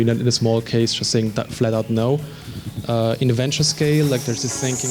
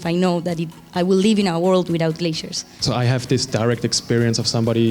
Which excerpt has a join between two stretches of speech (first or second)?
second